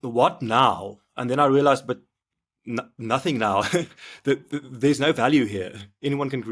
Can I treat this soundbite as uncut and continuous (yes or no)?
yes